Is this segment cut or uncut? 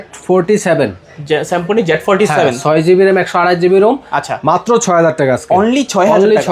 uncut